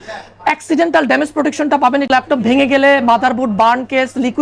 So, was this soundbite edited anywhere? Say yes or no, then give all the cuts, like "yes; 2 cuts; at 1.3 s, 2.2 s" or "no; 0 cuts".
yes; 1 cut; at 2.1 s